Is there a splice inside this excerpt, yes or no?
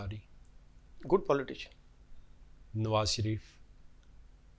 no